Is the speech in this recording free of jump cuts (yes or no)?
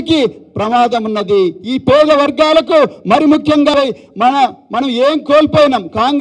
no